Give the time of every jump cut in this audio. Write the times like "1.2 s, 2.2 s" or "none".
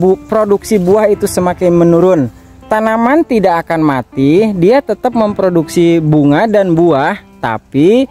none